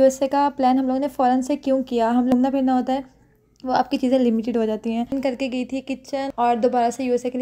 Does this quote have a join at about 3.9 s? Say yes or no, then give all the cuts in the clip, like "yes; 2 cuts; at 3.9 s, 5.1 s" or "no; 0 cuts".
no; 3 cuts; at 2.3 s, 5.1 s, 6.3 s